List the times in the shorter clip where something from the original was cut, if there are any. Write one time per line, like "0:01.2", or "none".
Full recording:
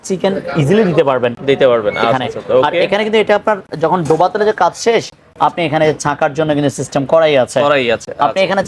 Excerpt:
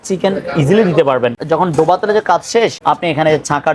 0:01.4
0:02.8

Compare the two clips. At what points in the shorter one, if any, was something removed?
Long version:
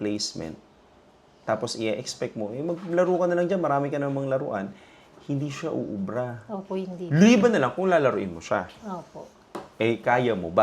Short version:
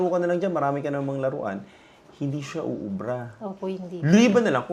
none

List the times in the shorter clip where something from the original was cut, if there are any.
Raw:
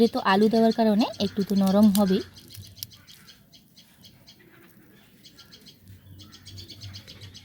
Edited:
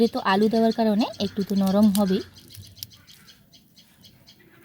none

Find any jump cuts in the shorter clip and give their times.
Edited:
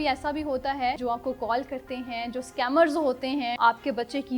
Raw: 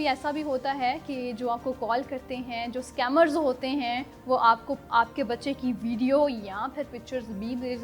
0:01.0
0:03.5

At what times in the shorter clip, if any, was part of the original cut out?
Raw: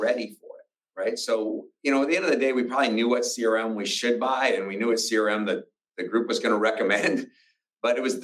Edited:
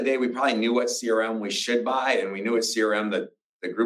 none

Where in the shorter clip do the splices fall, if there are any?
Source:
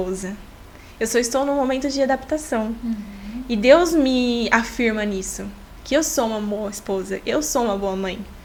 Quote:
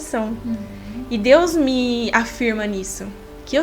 none

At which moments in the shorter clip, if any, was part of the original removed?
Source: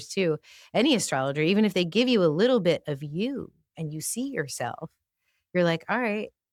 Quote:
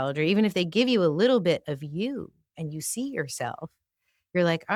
none

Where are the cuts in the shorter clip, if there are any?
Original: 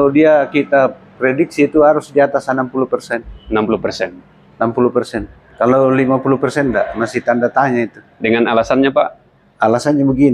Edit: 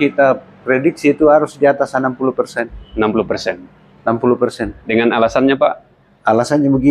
0:04.7

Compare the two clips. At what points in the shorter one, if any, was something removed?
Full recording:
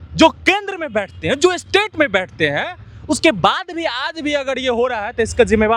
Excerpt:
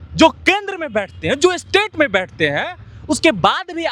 none

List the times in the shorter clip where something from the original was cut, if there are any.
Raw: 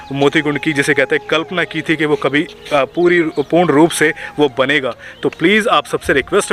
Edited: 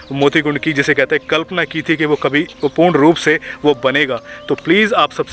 0:02.6

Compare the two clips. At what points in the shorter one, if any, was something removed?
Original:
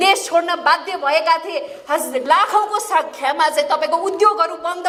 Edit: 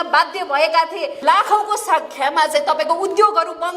0:01.2

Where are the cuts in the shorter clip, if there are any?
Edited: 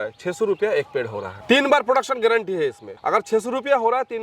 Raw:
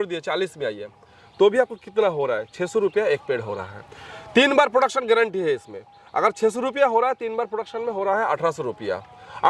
0:01.3
0:02.9

